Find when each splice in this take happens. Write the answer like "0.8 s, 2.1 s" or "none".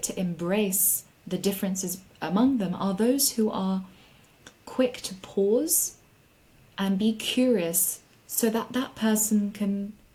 none